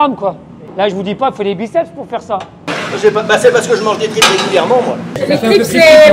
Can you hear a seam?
yes; 2 cuts; at 2.7 s, 5.1 s

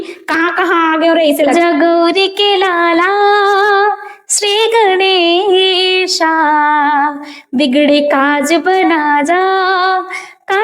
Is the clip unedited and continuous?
no; 1 cut; at 1.5 s

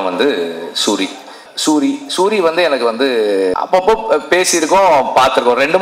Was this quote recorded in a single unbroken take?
no; 2 cuts; at 1.5 s, 3.6 s

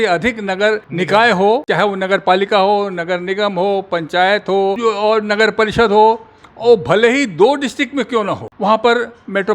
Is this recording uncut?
no; 4 cuts; at 0.9 s, 1.7 s, 4.8 s, 8.5 s

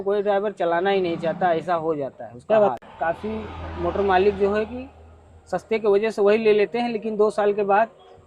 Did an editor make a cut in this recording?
no; 0 cuts

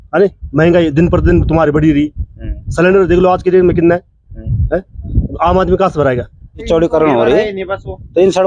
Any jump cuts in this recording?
yes; 1 cut; at 6.7 s

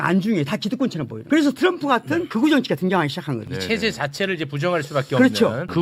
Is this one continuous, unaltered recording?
no; 2 cuts; at 1.1 s, 3.4 s

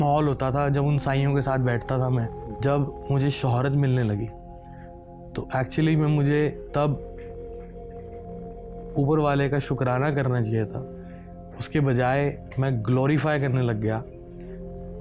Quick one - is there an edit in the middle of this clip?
yes; 2 cuts; at 2.5 s, 14.1 s

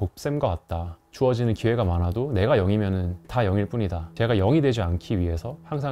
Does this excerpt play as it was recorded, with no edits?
no; 2 cuts; at 1.0 s, 3.2 s

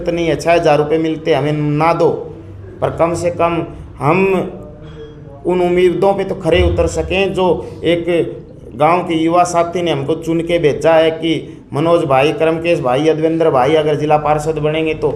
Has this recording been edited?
no; 0 cuts

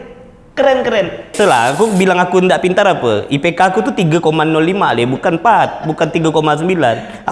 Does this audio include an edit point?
yes; 1 cut; at 1.3 s

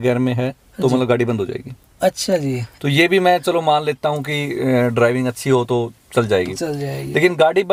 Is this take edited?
no; 0 cuts

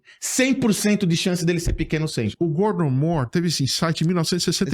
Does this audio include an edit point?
yes; 1 cut; at 2.3 s

